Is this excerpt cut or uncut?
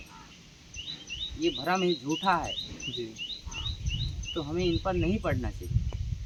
uncut